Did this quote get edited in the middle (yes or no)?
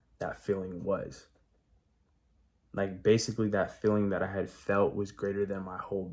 no